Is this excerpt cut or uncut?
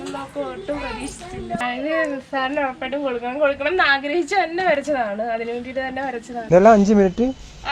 cut